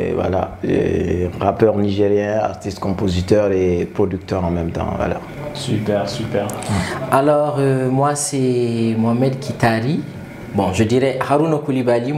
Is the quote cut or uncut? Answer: uncut